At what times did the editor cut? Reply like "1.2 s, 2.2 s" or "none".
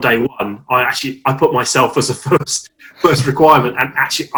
none

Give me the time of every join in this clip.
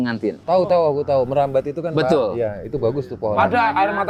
none

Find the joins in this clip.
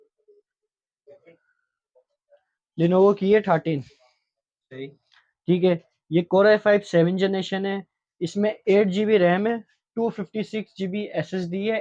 none

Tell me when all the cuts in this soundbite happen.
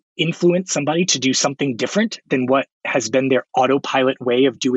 none

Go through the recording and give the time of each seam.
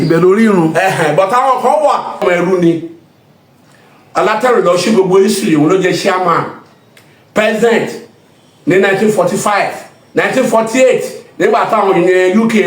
2.2 s

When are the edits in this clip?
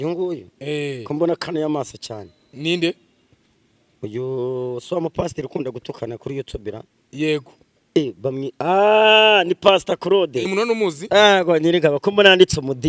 10.5 s

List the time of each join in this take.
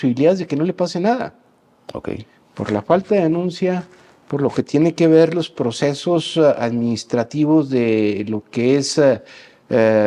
none

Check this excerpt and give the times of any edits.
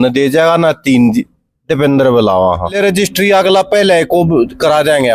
2.7 s

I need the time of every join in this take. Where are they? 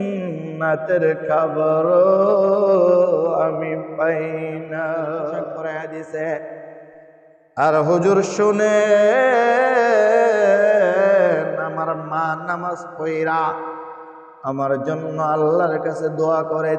5.6 s

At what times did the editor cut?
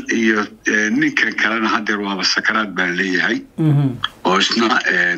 none

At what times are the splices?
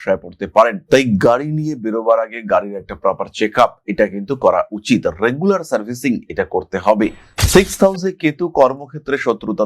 7.3 s

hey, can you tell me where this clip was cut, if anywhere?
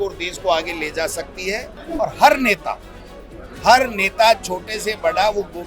1.8 s

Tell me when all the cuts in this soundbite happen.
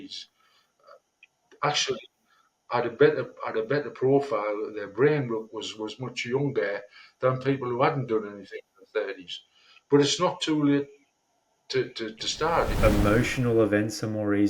12.7 s

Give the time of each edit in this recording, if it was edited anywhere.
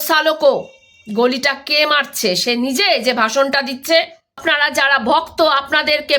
4.4 s

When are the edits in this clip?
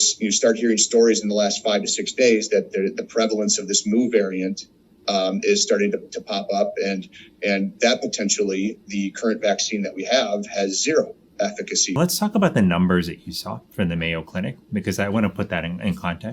12.0 s

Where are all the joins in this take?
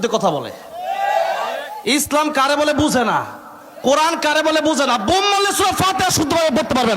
none

